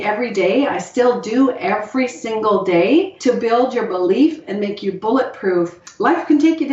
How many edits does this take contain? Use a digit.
2